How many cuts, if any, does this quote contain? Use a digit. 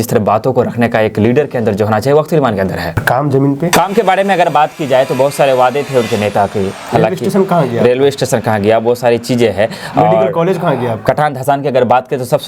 0